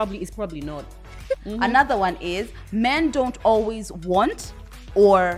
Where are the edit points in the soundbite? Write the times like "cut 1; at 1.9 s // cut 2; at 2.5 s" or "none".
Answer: cut 1; at 1.4 s